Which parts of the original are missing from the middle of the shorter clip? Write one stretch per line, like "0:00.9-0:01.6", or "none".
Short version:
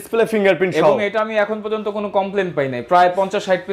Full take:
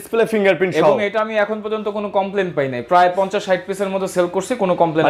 none